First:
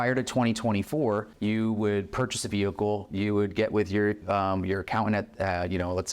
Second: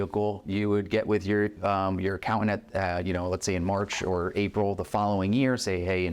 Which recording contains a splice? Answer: first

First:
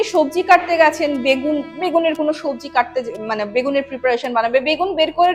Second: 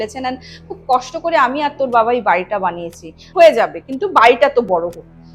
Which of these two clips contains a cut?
second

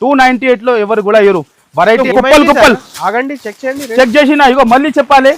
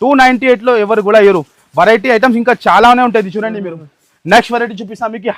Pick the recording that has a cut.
first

